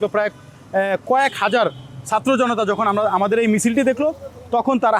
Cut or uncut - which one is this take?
uncut